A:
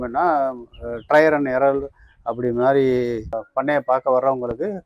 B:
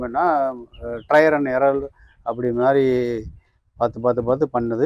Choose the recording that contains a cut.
A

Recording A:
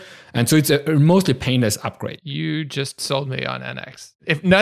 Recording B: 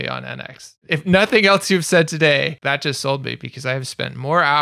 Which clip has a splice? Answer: B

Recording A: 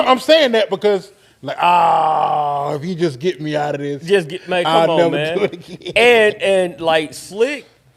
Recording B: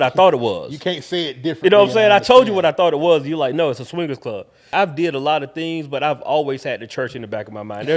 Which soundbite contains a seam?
B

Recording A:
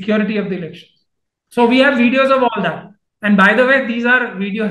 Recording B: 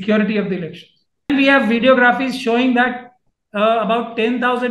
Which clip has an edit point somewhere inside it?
B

